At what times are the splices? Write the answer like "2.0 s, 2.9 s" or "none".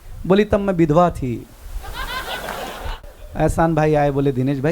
2.9 s